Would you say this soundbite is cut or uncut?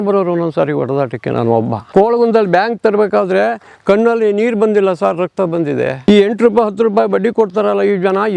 cut